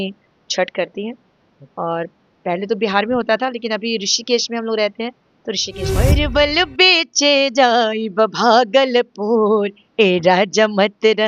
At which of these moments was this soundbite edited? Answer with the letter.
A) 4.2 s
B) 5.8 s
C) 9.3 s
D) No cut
B